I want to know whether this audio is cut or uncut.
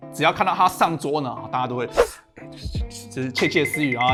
uncut